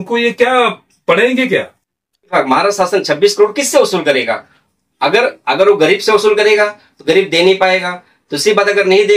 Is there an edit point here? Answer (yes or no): yes